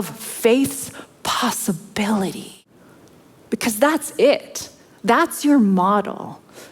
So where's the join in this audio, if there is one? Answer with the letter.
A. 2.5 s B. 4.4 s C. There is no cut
A